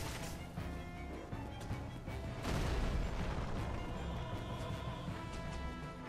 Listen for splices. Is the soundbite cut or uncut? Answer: uncut